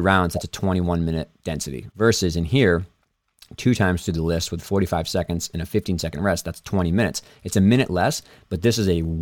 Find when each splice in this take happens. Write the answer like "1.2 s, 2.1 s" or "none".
1.8 s